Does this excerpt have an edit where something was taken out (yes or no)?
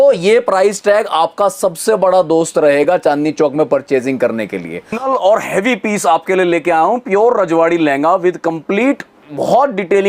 yes